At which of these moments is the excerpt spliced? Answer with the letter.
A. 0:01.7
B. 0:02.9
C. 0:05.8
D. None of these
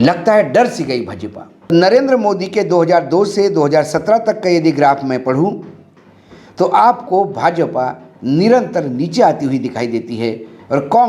A